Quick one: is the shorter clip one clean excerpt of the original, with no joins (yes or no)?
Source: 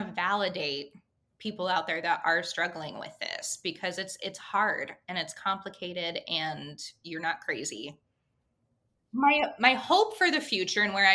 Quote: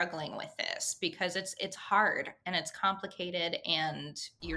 yes